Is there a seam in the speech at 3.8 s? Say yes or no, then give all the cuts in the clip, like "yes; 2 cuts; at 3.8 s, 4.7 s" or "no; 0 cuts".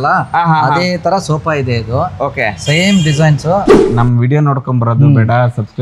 yes; 1 cut; at 3.8 s